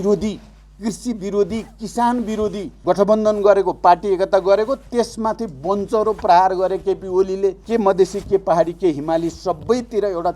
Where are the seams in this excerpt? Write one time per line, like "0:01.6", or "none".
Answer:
0:02.7
0:07.6